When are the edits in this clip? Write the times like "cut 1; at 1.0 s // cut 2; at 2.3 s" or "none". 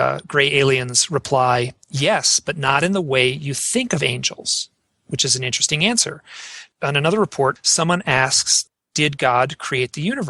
cut 1; at 6.7 s // cut 2; at 7.6 s // cut 3; at 8.5 s